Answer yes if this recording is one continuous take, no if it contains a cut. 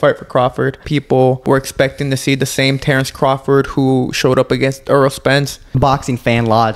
no